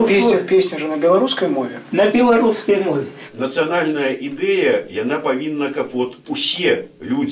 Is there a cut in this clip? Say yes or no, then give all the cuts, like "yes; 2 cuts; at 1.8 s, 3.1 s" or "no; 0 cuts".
yes; 1 cut; at 3.3 s